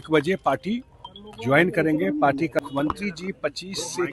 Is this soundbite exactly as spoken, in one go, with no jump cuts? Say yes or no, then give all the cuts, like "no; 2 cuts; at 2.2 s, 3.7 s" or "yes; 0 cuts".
no; 1 cut; at 2.6 s